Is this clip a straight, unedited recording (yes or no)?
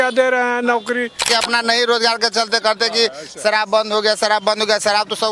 no